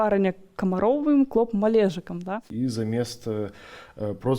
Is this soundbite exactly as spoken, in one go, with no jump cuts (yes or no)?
no